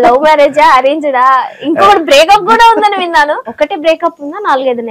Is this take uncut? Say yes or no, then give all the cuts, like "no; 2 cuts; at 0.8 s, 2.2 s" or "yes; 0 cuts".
no; 1 cut; at 3.5 s